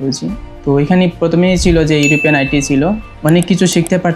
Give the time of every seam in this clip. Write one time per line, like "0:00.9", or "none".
0:03.1